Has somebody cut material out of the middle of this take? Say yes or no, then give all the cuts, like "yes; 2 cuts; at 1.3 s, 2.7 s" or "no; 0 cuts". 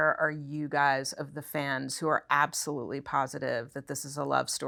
no; 0 cuts